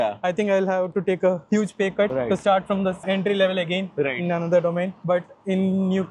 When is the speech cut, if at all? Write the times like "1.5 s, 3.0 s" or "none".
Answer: none